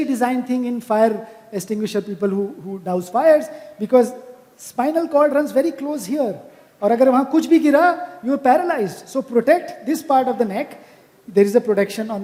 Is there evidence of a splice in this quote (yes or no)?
no